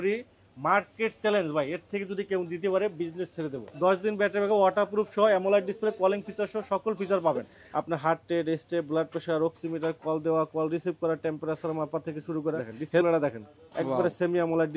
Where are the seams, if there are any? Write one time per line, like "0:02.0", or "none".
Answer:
0:03.6
0:07.6
0:13.0